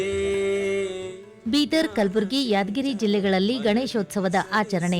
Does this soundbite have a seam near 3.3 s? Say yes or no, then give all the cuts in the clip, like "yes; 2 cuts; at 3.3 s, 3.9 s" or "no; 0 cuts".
no; 1 cut; at 1.3 s